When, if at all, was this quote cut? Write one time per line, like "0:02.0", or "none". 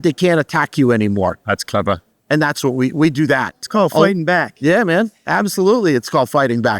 0:03.7